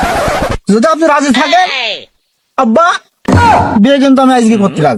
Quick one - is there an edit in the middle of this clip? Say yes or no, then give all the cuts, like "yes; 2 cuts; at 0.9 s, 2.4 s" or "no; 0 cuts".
no; 0 cuts